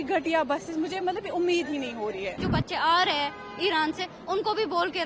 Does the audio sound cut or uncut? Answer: cut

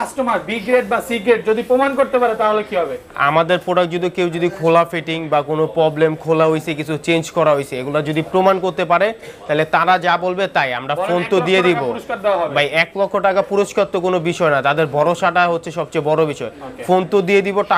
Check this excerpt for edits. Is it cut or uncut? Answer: uncut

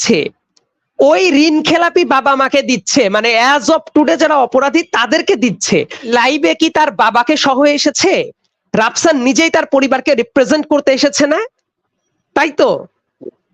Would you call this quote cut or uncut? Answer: cut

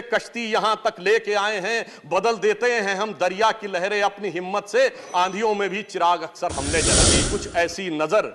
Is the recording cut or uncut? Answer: cut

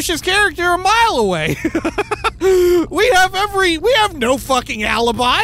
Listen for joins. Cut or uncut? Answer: uncut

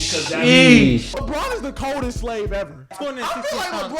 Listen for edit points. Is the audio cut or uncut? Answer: cut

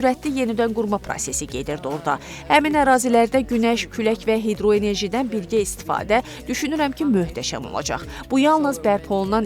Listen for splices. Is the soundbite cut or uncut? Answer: uncut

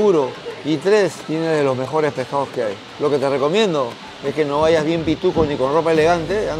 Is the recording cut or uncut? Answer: cut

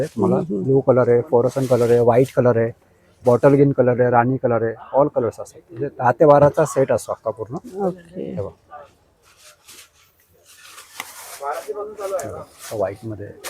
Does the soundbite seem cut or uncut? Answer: uncut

